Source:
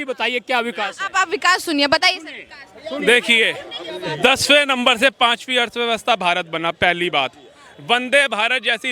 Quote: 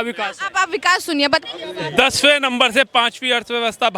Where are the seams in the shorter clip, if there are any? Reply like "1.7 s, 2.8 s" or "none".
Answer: 1.4 s